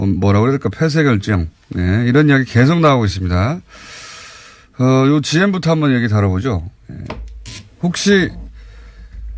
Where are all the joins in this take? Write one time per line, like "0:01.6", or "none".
0:04.8